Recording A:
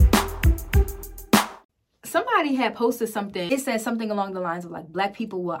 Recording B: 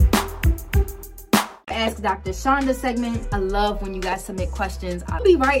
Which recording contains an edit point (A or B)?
A